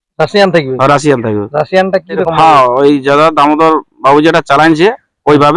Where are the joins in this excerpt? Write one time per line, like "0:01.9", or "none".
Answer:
0:02.2